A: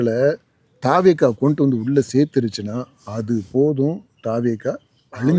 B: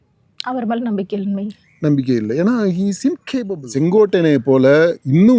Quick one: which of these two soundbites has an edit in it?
B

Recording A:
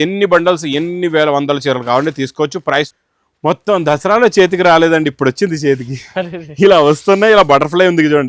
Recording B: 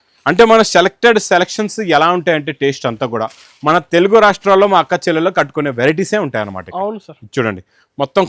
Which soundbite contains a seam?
A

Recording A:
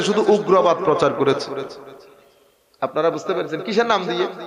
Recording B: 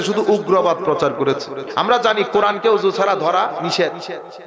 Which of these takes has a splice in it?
B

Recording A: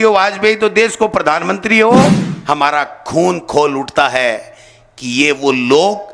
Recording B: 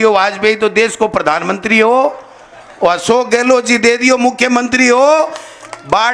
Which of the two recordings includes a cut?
A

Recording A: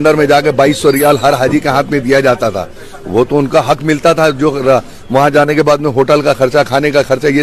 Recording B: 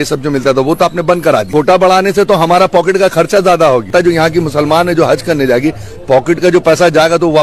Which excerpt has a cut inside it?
B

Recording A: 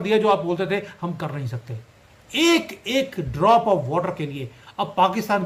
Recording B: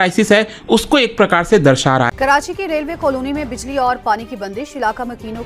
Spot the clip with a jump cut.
B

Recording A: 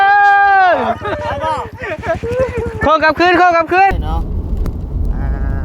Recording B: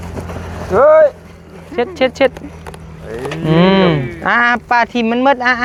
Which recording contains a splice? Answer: A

